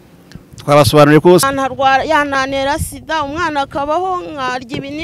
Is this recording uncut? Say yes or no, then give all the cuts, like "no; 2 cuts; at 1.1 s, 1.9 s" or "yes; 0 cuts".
no; 1 cut; at 1.5 s